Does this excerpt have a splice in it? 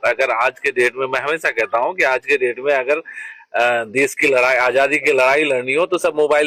no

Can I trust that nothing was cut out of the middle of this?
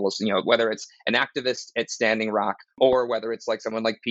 no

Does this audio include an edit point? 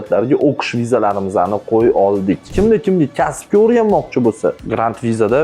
yes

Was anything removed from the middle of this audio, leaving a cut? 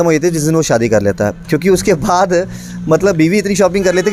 no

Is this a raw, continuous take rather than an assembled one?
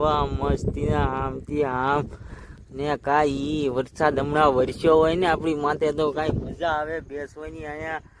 yes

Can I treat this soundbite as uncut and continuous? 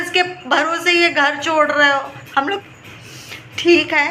no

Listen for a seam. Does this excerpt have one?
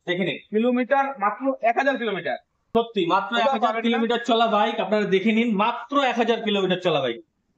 no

